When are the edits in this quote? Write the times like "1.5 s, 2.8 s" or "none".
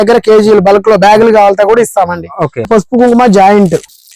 2.7 s